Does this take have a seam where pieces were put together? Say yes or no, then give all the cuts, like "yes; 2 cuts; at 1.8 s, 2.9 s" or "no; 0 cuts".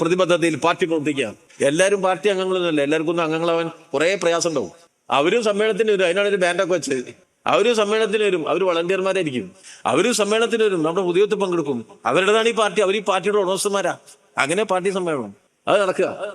yes; 1 cut; at 1.4 s